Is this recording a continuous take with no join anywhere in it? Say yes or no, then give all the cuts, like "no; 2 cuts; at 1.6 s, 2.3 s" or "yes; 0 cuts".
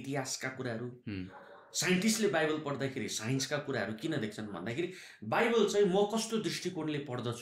yes; 0 cuts